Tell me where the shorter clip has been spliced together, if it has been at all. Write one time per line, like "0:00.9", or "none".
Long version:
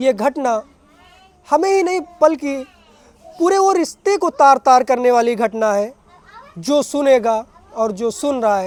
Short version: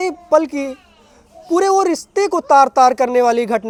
none